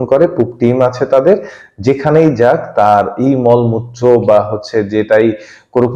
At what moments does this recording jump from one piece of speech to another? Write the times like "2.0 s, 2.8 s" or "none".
none